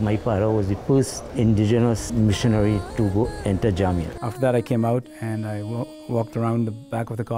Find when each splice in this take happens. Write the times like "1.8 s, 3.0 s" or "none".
0.8 s, 2.0 s, 4.1 s